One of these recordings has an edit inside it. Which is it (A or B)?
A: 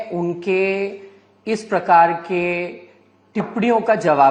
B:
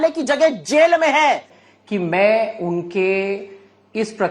B